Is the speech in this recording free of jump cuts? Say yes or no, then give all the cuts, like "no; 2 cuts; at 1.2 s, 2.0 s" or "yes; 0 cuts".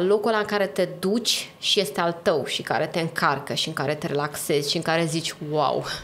yes; 0 cuts